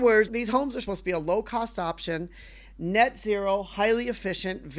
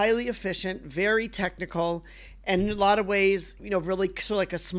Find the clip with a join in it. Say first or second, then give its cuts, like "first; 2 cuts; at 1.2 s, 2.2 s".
second; 1 cut; at 3.6 s